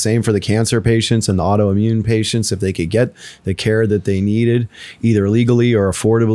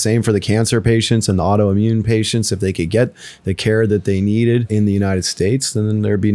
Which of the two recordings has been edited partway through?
second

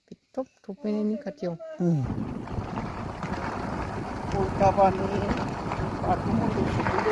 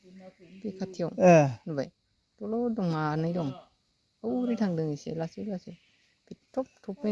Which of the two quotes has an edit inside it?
first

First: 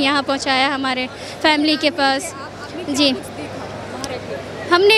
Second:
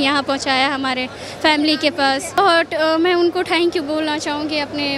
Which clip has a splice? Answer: second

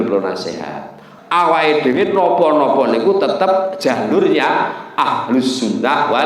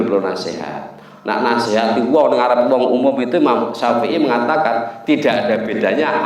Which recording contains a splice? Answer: first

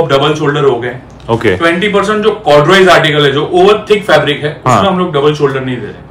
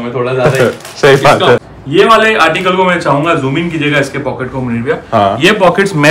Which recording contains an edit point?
second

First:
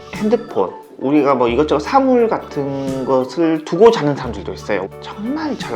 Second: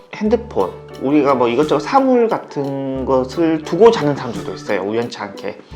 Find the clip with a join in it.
first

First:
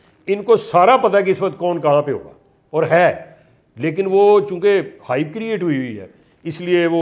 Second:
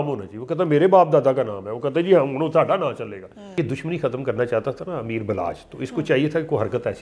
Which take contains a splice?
second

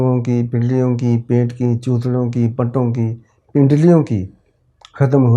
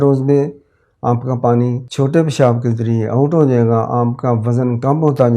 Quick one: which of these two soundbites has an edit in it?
second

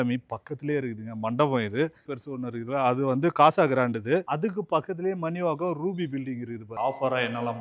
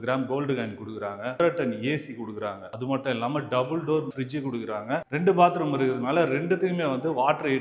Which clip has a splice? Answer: first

